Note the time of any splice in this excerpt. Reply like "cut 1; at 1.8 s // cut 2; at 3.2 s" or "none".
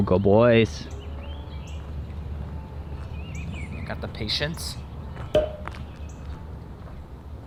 none